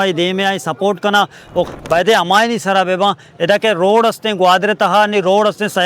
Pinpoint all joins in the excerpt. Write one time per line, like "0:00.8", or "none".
0:01.7